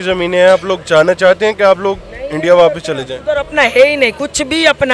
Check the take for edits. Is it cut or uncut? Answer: uncut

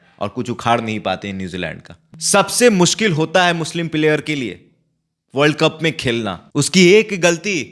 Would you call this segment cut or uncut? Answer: cut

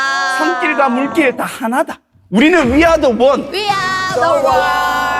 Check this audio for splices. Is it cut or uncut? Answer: uncut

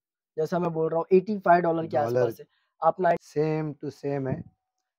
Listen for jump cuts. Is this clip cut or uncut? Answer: cut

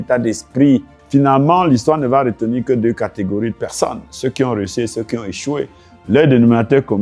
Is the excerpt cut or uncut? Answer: cut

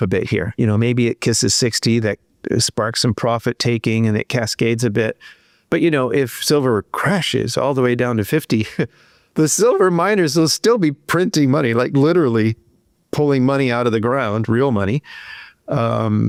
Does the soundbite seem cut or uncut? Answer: uncut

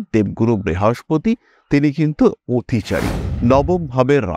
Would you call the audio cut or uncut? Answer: cut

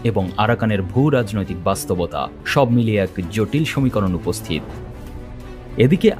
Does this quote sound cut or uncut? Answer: cut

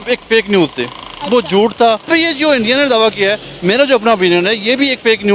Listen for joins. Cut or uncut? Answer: cut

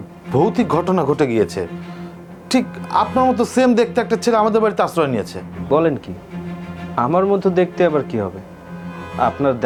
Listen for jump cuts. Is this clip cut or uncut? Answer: uncut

